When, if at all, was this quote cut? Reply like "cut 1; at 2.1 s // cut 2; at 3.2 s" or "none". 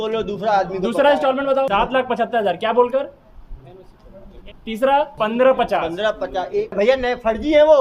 cut 1; at 1.7 s // cut 2; at 4.3 s // cut 3; at 5.1 s // cut 4; at 6.7 s